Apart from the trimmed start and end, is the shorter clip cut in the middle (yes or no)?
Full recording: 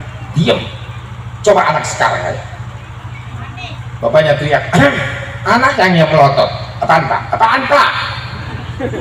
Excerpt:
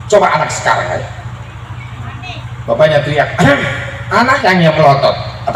no